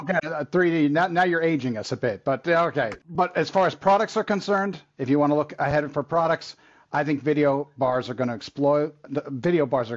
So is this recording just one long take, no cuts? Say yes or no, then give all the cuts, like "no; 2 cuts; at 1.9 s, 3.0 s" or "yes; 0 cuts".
no; 1 cut; at 3.0 s